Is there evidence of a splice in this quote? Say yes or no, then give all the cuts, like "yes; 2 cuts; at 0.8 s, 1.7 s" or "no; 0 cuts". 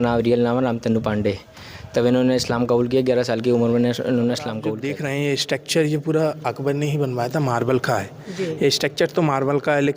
yes; 1 cut; at 4.7 s